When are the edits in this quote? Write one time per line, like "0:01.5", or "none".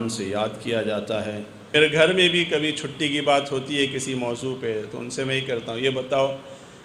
0:01.7